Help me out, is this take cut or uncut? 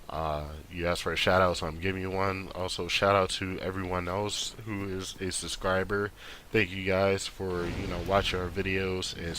cut